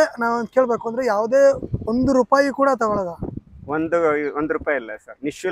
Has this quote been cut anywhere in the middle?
no; 0 cuts

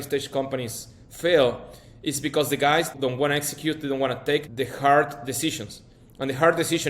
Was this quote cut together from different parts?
yes; 2 cuts; at 2.9 s, 4.5 s

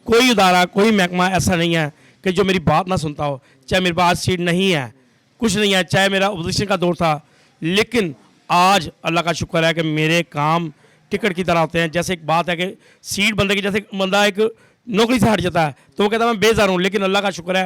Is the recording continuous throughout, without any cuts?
yes; 0 cuts

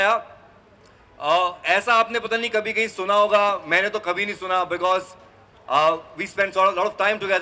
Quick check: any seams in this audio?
no; 0 cuts

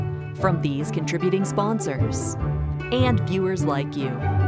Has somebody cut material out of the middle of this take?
no; 0 cuts

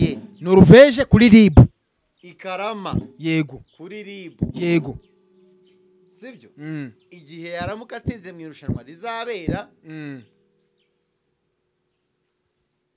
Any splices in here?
no; 0 cuts

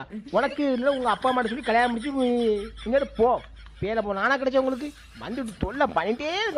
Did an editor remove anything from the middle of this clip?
no; 0 cuts

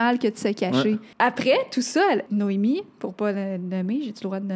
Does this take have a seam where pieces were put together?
yes; 2 cuts; at 1.1 s, 2.3 s

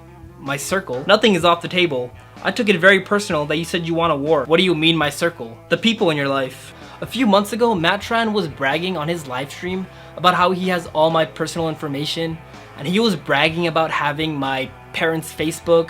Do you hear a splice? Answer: yes; 2 cuts; at 4.5 s, 6.7 s

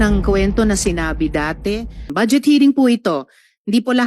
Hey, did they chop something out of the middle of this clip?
yes; 1 cut; at 2.1 s

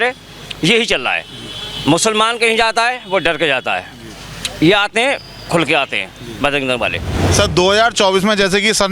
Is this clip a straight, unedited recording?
no; 1 cut; at 7.2 s

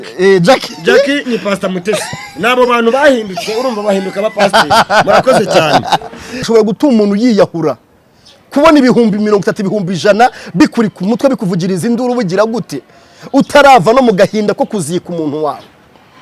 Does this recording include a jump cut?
yes; 1 cut; at 6.4 s

